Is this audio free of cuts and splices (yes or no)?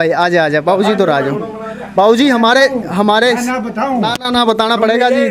yes